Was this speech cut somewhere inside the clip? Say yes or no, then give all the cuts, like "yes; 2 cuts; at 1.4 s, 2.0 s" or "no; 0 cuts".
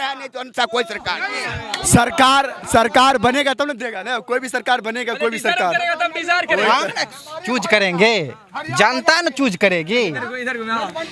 no; 0 cuts